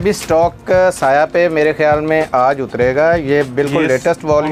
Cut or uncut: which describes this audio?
uncut